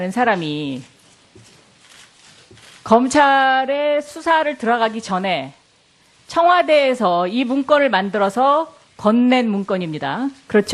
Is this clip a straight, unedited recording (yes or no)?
yes